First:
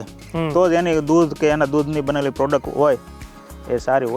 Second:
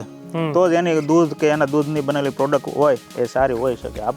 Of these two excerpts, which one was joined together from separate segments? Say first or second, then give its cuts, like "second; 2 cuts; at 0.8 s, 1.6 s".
second; 1 cut; at 3.1 s